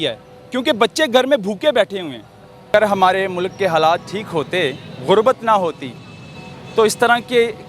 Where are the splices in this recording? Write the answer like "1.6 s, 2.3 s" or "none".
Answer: 2.7 s